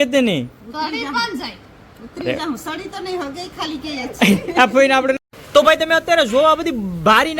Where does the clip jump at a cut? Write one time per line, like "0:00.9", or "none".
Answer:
0:05.2